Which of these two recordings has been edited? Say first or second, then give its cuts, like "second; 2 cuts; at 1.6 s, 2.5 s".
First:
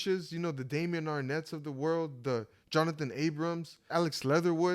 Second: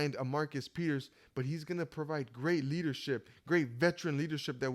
first; 1 cut; at 3.8 s